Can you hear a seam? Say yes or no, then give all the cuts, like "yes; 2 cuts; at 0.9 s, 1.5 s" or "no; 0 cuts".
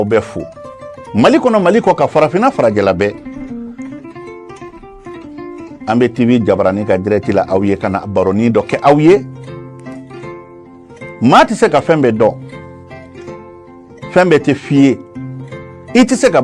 no; 0 cuts